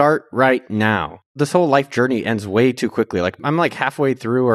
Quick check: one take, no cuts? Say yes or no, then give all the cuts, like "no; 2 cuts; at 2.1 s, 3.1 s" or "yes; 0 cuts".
no; 2 cuts; at 1.3 s, 3.4 s